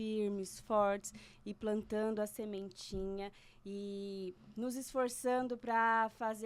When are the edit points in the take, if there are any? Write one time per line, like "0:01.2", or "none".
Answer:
none